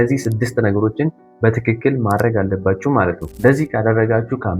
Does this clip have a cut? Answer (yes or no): yes